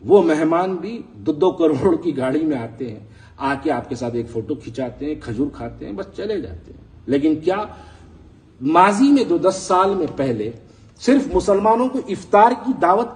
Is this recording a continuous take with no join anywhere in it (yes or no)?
yes